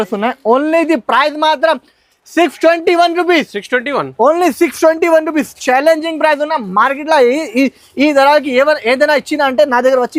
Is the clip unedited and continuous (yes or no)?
yes